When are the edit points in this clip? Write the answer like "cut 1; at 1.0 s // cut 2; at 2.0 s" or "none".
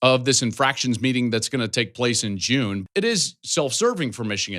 cut 1; at 2.8 s